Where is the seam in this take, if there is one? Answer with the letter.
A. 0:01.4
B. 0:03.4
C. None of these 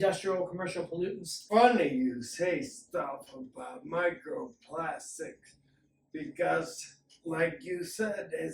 A